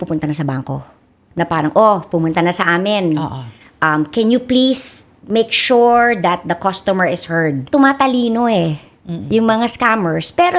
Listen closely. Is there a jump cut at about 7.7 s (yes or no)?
yes